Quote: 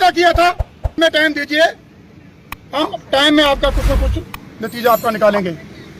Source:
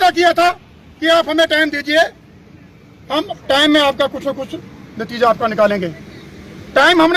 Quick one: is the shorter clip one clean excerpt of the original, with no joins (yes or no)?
no